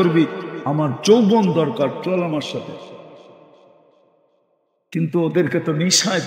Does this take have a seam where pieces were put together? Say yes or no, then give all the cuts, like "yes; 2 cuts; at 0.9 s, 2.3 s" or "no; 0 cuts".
no; 0 cuts